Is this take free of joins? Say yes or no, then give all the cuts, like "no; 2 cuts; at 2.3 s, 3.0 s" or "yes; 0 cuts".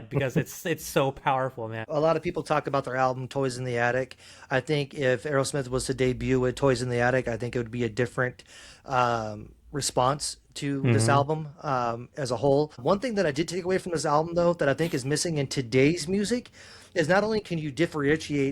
no; 2 cuts; at 1.9 s, 12.8 s